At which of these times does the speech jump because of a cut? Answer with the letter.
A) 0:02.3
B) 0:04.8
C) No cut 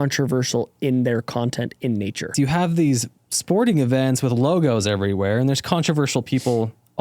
A